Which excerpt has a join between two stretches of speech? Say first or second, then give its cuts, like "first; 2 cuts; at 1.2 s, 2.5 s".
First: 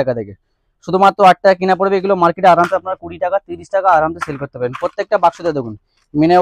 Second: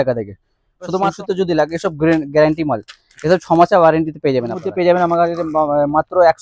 second; 2 cuts; at 1.0 s, 4.6 s